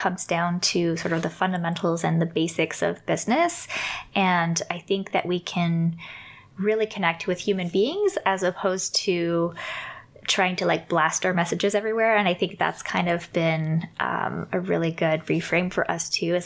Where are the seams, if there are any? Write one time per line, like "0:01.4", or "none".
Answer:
none